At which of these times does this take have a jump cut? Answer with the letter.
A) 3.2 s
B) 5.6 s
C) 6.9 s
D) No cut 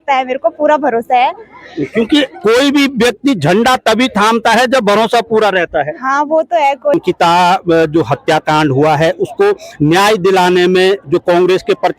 C